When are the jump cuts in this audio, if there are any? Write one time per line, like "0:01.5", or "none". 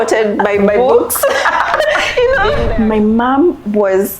0:02.6